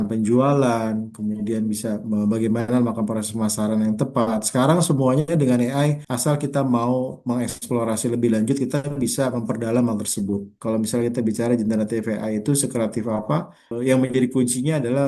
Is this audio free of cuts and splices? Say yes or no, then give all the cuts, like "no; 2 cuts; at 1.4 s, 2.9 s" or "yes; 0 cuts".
no; 2 cuts; at 10.5 s, 13.7 s